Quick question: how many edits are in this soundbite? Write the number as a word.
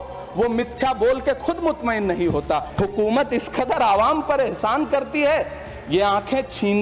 one